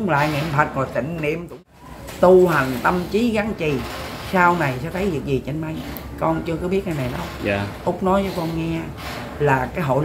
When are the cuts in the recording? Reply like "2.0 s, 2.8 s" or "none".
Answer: 1.5 s